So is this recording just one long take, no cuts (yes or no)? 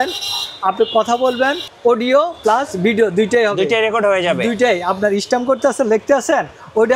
yes